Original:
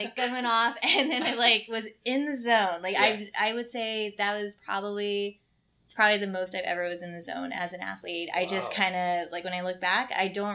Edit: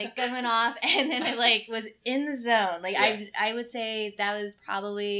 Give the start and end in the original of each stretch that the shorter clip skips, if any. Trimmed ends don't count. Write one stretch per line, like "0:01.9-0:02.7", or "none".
none